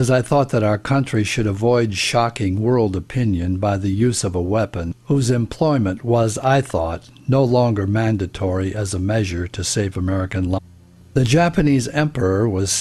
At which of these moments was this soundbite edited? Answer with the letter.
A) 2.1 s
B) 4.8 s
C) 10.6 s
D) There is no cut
D